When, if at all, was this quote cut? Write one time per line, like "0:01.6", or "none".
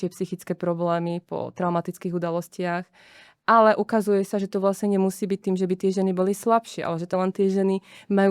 0:07.1